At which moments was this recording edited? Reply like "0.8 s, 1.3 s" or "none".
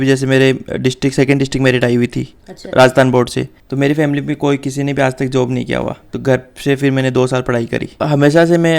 3.5 s, 6.1 s, 8.0 s